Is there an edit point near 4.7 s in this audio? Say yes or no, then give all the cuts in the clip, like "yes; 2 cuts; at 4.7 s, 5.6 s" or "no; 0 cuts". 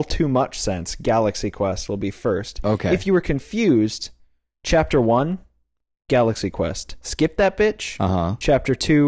no; 1 cut; at 1.0 s